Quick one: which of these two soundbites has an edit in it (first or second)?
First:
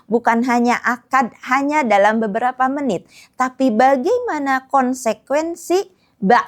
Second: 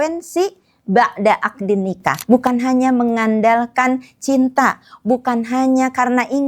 second